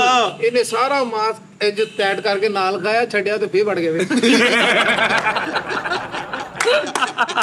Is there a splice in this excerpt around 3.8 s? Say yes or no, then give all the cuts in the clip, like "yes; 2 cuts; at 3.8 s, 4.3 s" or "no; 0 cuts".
no; 0 cuts